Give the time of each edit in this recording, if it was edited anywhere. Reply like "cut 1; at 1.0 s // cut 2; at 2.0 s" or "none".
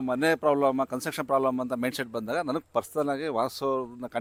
none